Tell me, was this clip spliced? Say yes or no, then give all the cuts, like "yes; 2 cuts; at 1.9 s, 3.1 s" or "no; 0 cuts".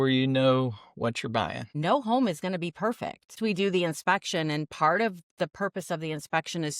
yes; 2 cuts; at 1.6 s, 3.3 s